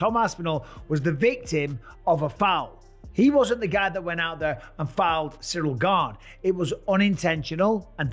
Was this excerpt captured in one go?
yes; 0 cuts

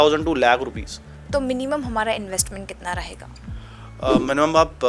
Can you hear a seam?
yes; 1 cut; at 1.1 s

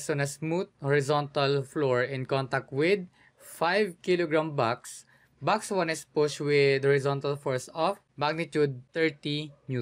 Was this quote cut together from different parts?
yes; 2 cuts; at 8.1 s, 8.8 s

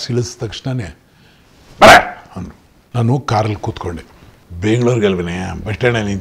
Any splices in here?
no; 0 cuts

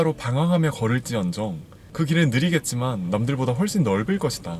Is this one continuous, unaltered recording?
yes; 0 cuts

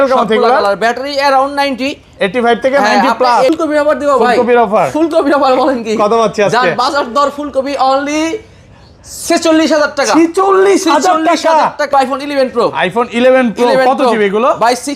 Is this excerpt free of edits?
no; 2 cuts; at 3.5 s, 11.9 s

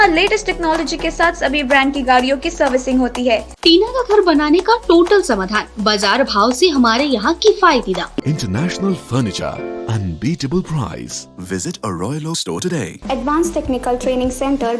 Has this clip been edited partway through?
yes; 3 cuts; at 3.5 s, 8.2 s, 12.9 s

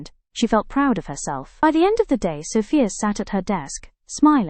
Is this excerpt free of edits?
no; 1 cut; at 1.6 s

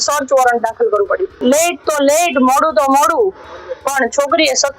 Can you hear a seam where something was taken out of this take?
yes; 1 cut; at 1.3 s

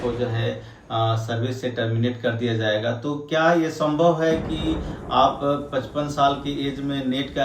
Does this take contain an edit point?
no; 0 cuts

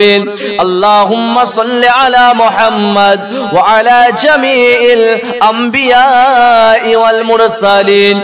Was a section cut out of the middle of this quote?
no; 0 cuts

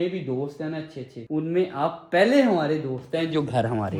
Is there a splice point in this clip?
no; 0 cuts

